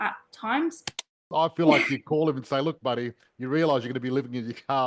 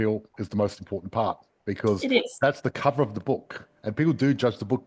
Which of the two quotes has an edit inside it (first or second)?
first